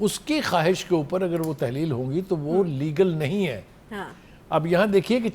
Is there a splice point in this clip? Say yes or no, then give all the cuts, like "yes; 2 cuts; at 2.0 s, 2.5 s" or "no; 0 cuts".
no; 0 cuts